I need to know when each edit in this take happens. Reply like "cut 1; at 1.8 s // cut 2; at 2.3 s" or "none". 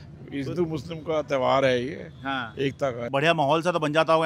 cut 1; at 3.1 s